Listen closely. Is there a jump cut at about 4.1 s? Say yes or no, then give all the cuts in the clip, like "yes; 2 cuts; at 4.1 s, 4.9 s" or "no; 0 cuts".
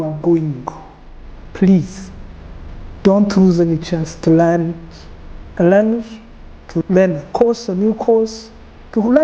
yes; 3 cuts; at 1.4 s, 4.1 s, 6.8 s